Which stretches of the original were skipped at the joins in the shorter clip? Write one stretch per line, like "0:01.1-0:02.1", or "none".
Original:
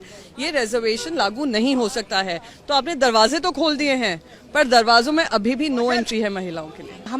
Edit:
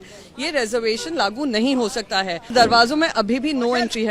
0:02.5-0:04.7